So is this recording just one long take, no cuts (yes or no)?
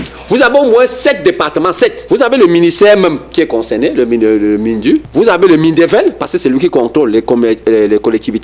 no